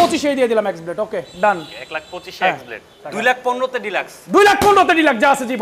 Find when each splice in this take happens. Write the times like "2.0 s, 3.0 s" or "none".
3.0 s